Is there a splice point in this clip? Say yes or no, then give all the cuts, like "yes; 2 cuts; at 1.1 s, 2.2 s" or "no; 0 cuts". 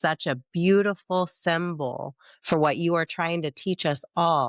no; 0 cuts